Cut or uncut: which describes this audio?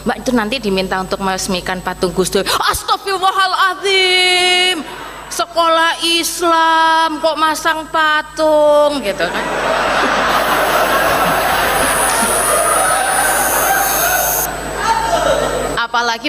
uncut